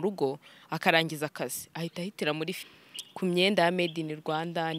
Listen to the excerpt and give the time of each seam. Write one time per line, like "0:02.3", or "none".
0:02.6